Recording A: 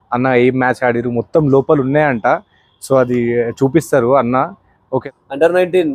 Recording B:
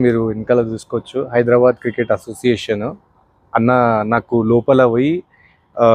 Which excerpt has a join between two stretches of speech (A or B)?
A